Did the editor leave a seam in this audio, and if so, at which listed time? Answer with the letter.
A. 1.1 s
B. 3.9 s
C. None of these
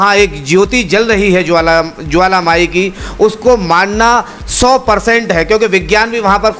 C